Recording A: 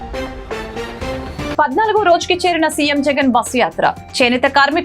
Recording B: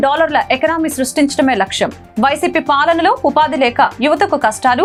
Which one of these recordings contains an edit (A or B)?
A